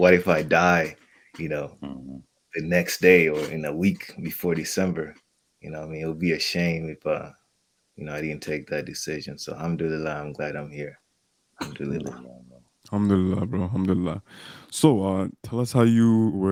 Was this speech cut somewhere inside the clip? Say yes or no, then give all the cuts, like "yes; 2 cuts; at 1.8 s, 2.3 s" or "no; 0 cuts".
no; 0 cuts